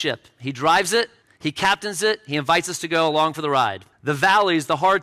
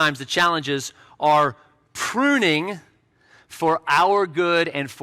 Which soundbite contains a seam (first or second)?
first